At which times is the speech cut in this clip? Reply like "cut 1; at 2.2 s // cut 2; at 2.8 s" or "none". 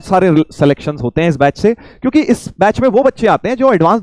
none